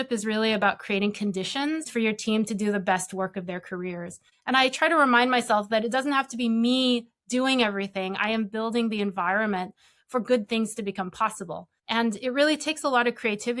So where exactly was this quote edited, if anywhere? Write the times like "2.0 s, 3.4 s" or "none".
1.9 s, 4.2 s, 11.7 s